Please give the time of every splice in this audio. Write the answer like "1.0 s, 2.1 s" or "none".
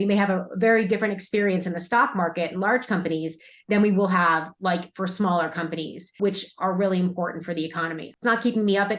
6.1 s, 8.1 s

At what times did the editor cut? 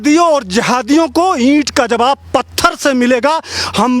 none

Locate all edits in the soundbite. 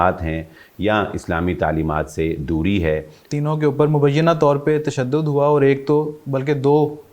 3.2 s

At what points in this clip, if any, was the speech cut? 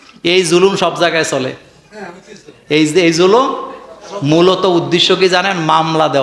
none

